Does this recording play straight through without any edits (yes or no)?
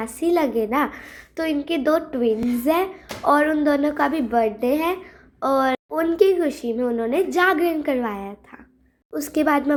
yes